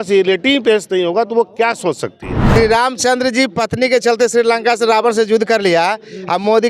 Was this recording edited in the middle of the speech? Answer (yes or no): yes